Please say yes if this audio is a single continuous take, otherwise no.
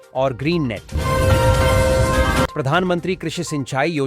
no